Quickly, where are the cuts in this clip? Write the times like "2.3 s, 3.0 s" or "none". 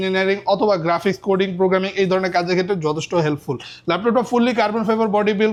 none